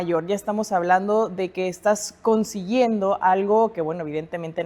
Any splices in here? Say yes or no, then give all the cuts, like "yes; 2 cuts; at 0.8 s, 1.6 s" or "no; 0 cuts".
no; 0 cuts